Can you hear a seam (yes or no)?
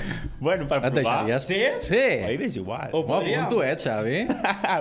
no